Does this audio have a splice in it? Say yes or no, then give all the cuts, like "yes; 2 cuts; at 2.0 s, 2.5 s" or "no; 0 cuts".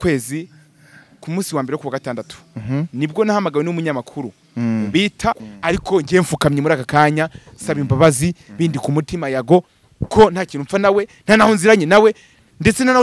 yes; 1 cut; at 5.5 s